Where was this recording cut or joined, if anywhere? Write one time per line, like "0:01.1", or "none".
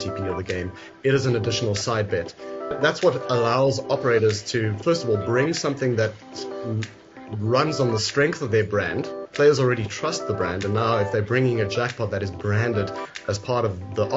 0:02.8